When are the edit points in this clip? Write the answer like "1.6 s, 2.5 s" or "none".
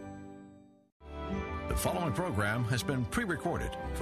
1.0 s